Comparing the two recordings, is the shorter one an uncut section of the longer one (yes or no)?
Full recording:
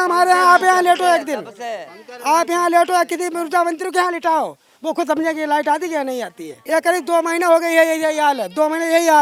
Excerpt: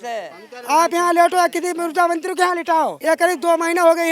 no